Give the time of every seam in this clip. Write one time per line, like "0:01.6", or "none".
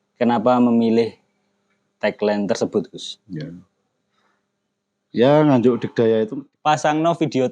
0:06.4